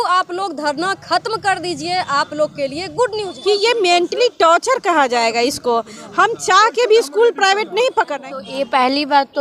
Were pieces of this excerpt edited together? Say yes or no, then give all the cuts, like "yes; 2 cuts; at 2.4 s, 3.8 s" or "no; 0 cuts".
yes; 2 cuts; at 3.3 s, 8.2 s